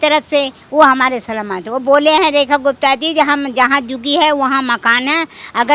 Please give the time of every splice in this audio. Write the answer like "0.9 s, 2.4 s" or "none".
none